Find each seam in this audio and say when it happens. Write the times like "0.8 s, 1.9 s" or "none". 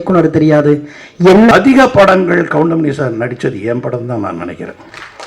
1.5 s